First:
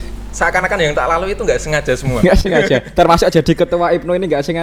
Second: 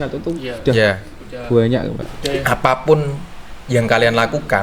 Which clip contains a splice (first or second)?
second